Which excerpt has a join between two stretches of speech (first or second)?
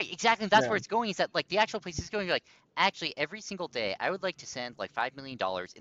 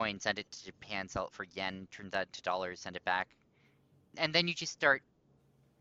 second